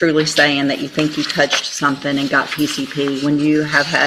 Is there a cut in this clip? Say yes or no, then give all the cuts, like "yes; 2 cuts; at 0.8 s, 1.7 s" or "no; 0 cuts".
no; 0 cuts